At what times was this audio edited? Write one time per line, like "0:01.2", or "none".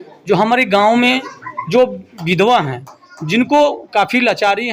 none